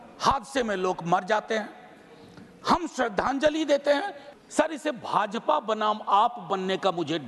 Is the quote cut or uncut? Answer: cut